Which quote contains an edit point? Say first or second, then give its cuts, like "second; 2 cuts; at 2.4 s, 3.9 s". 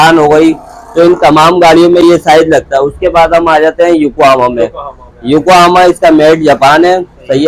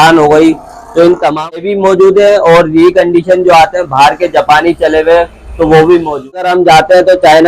second; 2 cuts; at 1.6 s, 6.4 s